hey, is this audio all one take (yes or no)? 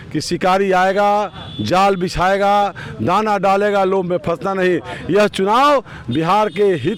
yes